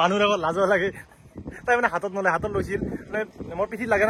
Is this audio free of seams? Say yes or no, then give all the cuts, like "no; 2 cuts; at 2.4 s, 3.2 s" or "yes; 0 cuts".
yes; 0 cuts